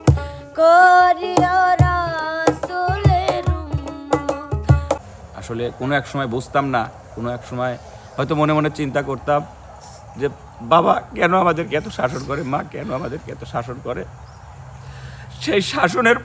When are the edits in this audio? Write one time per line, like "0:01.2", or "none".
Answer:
0:05.0